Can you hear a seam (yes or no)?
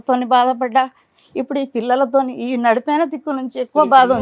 no